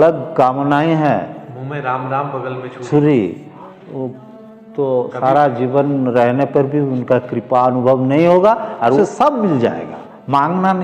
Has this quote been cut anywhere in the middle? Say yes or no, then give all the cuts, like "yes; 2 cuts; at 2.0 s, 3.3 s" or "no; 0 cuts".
yes; 1 cut; at 9.0 s